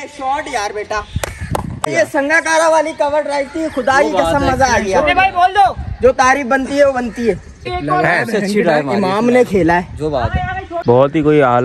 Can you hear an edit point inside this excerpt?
yes; 3 cuts; at 1.9 s, 7.7 s, 10.7 s

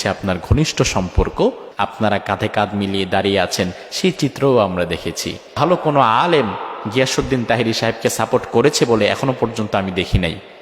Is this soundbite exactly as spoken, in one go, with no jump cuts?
no; 2 cuts; at 1.7 s, 5.5 s

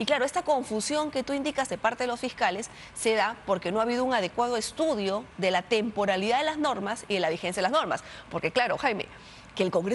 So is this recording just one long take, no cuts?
yes; 0 cuts

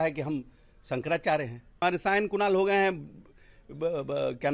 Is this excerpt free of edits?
no; 1 cut; at 1.8 s

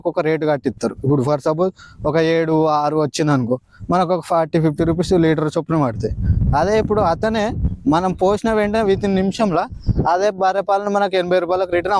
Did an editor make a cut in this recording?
no; 0 cuts

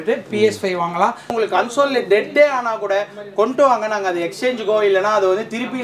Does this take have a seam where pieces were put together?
yes; 1 cut; at 1.3 s

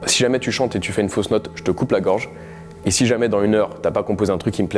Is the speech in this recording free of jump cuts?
yes; 0 cuts

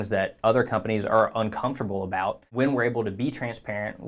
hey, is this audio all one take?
no; 1 cut; at 2.5 s

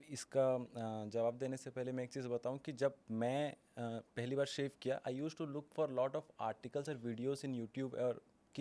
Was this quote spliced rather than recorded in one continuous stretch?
no; 0 cuts

